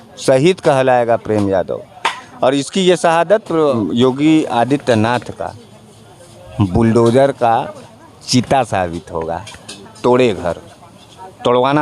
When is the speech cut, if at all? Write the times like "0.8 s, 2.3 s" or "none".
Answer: 3.7 s